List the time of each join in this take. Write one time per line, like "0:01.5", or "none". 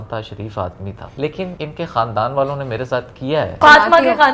0:01.3
0:03.6